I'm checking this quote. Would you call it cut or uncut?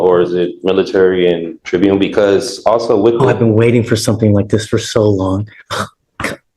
cut